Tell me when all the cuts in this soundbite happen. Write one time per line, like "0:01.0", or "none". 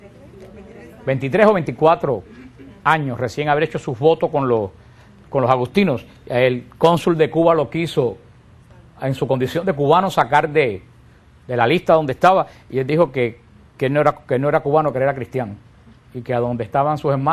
0:11.4